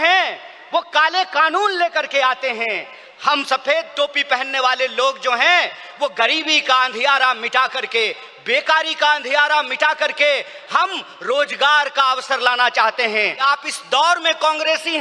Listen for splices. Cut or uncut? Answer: cut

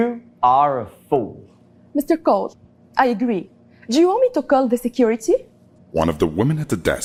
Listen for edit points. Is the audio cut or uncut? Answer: uncut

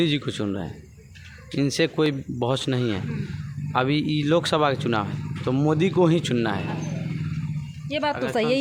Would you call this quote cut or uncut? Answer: uncut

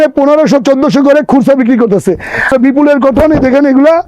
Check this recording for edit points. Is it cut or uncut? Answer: cut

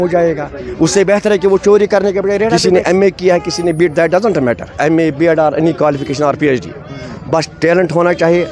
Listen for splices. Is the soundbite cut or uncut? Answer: cut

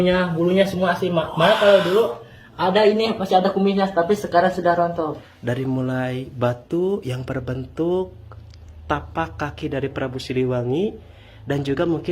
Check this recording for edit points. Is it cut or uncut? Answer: cut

